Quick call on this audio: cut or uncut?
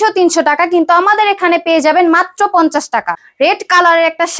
cut